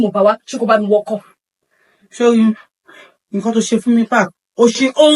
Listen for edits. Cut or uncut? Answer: uncut